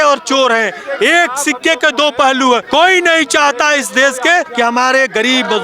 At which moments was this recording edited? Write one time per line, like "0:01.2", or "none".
0:02.6
0:04.5